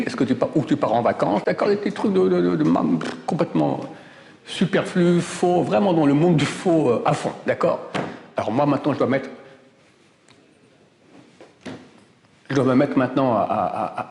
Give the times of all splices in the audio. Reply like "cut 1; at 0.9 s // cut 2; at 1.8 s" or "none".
none